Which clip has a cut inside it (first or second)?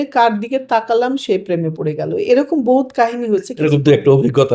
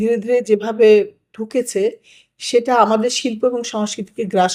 first